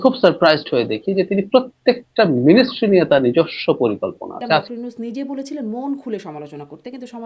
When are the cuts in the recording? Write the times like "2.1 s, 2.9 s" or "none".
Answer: 4.6 s